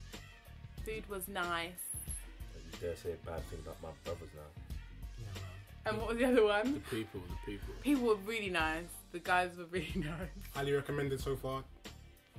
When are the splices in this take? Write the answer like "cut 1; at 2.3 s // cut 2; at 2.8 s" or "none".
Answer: cut 1; at 4.4 s